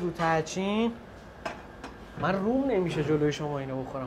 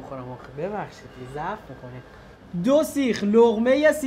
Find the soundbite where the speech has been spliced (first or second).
second